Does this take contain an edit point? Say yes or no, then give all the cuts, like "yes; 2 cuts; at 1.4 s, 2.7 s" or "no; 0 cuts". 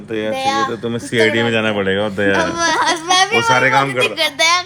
no; 0 cuts